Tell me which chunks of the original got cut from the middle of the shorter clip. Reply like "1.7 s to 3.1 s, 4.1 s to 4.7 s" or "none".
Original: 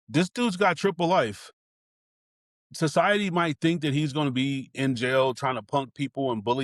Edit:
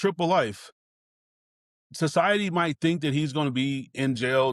none